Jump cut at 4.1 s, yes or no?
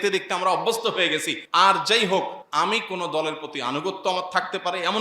no